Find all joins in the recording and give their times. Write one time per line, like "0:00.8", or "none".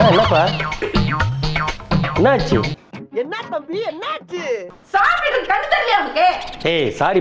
none